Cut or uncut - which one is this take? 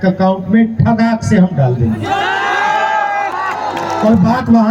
uncut